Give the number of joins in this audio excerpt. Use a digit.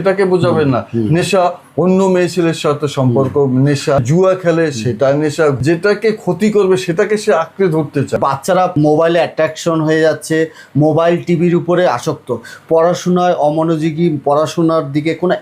3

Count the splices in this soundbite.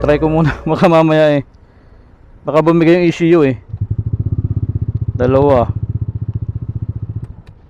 0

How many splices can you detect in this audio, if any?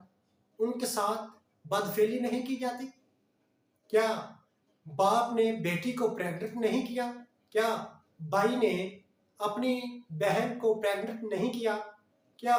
0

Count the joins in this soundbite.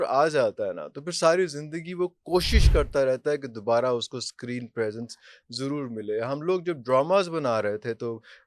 0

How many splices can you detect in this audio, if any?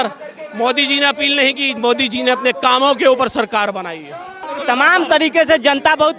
1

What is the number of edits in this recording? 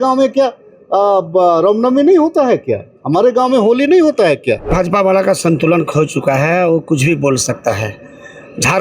1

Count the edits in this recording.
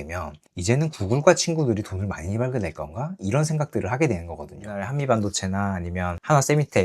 1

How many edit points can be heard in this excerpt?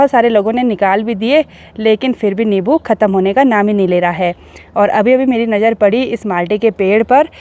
0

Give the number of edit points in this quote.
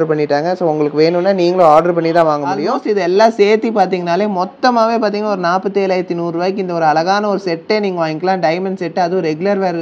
1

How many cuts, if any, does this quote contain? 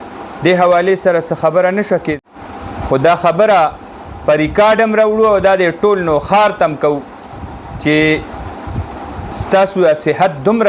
1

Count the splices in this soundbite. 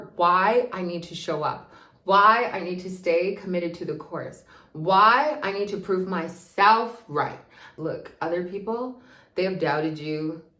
1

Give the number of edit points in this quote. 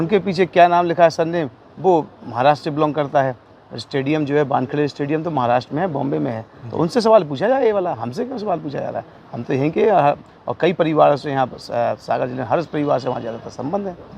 0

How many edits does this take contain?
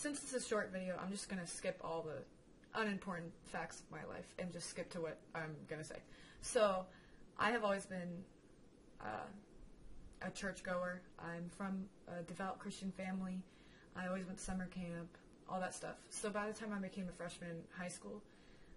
1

